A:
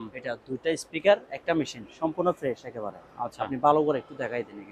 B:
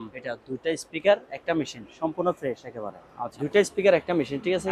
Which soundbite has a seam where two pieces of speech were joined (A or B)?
B